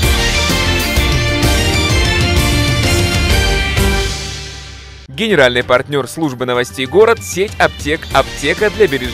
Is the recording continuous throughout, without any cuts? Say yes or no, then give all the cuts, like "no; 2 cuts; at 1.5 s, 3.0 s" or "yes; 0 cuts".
yes; 0 cuts